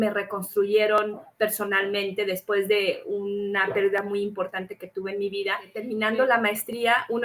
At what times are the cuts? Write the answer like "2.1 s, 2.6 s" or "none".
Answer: 5.9 s